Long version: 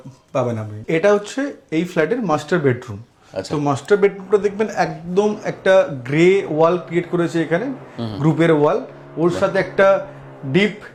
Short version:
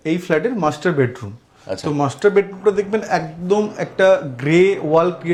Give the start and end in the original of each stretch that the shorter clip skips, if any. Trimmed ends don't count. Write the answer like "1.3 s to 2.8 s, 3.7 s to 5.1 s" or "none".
none